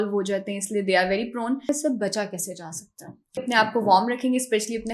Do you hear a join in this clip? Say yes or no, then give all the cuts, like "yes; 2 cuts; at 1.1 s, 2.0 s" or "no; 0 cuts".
yes; 2 cuts; at 1.7 s, 3.4 s